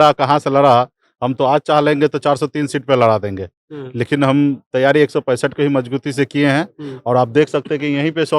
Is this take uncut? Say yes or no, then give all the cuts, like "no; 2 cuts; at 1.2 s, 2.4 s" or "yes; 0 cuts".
yes; 0 cuts